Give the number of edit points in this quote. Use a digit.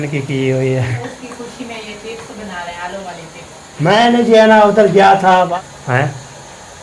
2